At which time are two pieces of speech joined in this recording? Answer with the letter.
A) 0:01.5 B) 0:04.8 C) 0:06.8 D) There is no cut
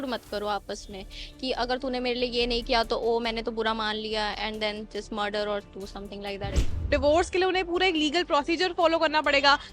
C